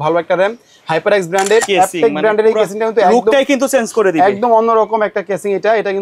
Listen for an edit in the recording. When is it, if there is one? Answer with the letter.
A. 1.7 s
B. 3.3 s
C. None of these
A